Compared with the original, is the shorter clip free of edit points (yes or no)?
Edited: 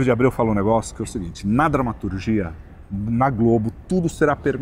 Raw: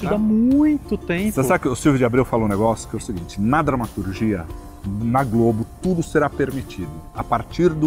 yes